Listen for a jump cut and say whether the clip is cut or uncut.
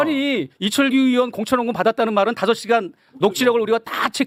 uncut